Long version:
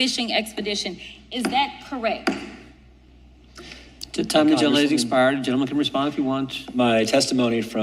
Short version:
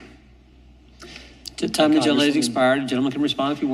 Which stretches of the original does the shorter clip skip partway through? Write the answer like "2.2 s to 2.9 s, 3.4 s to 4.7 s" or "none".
none